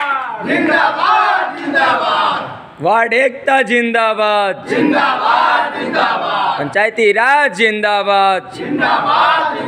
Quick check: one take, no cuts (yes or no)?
yes